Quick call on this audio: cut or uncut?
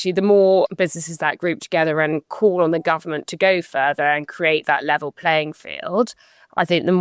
uncut